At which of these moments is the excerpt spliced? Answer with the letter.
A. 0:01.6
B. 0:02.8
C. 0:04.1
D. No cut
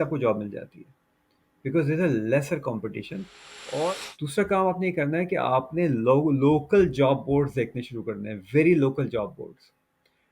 C